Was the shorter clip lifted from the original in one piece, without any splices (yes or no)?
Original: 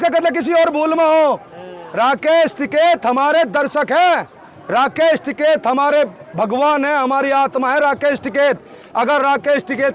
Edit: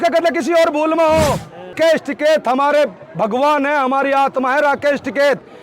no